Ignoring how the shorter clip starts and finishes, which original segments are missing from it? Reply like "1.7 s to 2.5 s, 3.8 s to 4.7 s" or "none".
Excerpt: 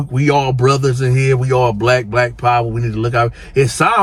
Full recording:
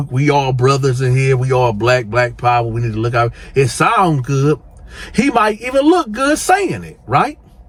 none